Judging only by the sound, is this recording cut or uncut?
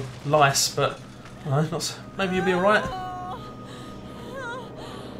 uncut